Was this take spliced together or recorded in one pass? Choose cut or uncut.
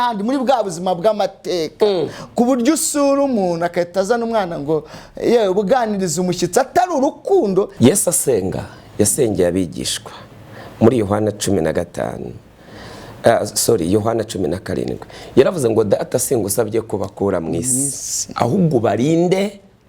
cut